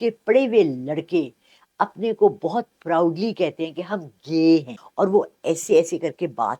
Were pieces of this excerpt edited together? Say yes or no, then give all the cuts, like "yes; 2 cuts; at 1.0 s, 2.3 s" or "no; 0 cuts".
yes; 1 cut; at 4.8 s